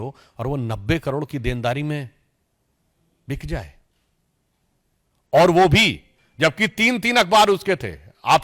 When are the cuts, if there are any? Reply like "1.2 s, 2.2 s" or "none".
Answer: none